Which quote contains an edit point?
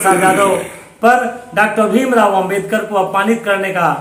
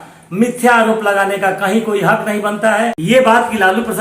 second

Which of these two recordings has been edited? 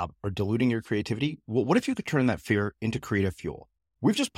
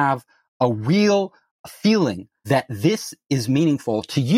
second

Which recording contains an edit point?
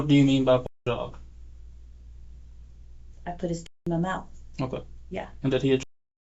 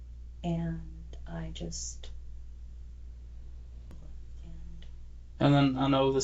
second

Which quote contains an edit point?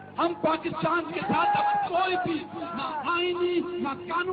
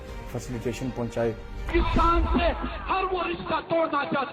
second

